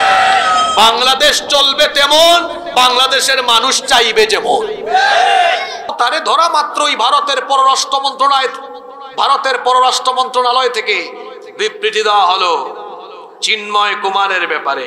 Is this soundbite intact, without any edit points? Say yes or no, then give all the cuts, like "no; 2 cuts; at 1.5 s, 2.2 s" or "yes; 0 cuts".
no; 1 cut; at 5.9 s